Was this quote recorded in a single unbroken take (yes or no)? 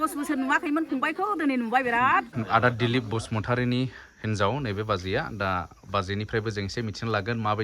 no